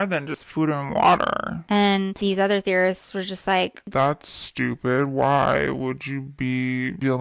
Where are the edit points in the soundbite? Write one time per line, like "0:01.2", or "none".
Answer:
0:02.1
0:03.8